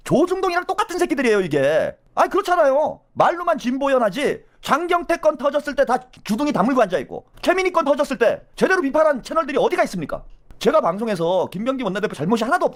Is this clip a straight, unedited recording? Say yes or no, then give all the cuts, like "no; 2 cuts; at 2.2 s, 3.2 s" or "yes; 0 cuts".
yes; 0 cuts